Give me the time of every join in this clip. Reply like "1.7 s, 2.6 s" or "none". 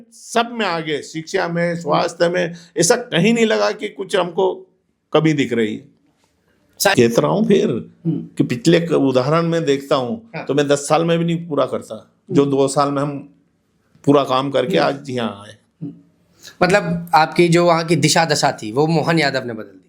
6.9 s